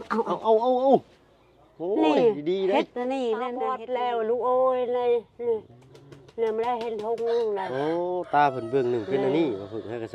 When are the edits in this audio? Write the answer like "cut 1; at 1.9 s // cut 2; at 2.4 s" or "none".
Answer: cut 1; at 3.8 s